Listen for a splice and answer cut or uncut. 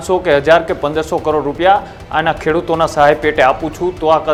uncut